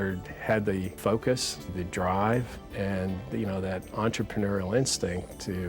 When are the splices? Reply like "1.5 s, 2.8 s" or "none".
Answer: 1.0 s, 1.7 s, 2.6 s